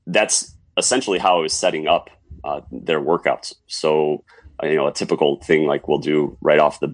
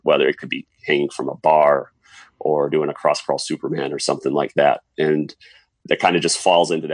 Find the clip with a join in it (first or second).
second